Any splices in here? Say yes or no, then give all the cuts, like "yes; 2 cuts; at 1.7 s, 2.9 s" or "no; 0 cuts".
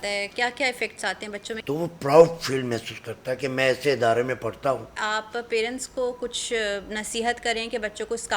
yes; 2 cuts; at 1.5 s, 4.9 s